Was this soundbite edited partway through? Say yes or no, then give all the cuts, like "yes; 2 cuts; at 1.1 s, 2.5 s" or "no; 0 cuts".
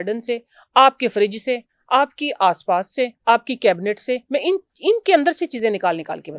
no; 0 cuts